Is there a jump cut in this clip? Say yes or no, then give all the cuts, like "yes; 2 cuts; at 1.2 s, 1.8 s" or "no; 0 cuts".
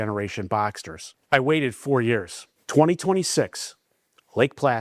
no; 0 cuts